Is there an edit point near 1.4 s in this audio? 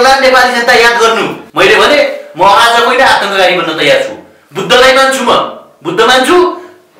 yes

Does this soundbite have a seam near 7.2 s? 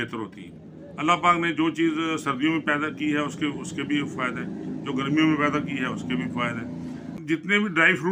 yes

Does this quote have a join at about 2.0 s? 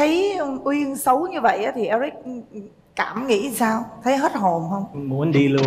no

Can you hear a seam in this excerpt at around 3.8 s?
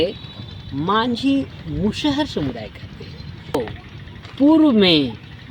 yes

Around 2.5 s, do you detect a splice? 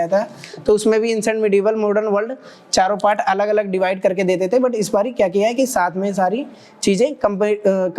no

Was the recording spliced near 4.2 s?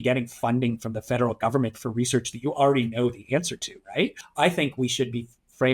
yes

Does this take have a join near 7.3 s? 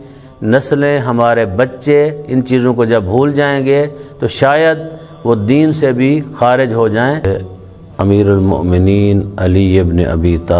yes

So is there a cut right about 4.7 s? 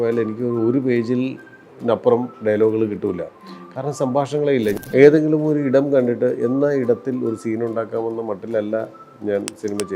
yes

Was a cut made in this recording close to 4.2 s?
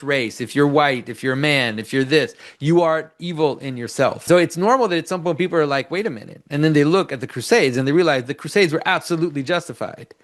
yes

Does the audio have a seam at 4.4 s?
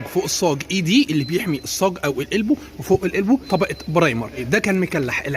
yes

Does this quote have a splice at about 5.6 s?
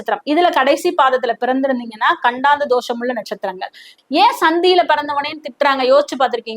no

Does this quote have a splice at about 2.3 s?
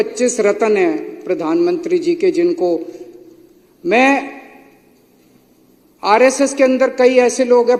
no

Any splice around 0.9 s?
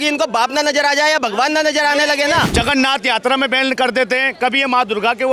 no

